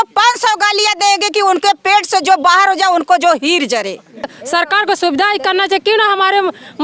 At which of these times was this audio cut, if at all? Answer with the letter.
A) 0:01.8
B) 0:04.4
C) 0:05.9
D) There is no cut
B